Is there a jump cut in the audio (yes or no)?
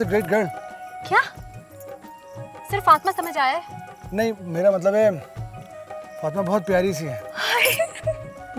no